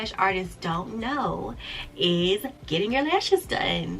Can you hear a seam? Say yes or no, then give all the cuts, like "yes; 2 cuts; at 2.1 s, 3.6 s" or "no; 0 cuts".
no; 0 cuts